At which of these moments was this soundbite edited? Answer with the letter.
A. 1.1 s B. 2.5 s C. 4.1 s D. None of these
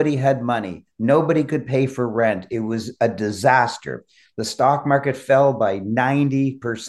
D